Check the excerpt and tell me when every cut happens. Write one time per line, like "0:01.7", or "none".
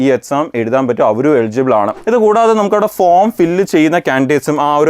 0:02.0